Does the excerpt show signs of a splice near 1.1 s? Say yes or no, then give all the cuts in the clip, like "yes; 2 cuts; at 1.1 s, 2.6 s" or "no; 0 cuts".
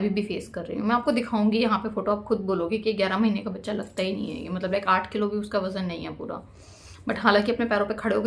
no; 0 cuts